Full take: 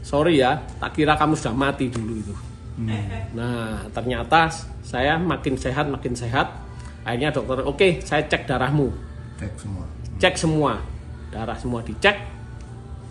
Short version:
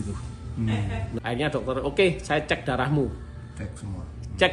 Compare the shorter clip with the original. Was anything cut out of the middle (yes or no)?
yes